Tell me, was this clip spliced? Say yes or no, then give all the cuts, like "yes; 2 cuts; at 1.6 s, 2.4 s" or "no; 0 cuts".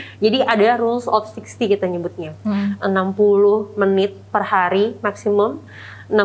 no; 0 cuts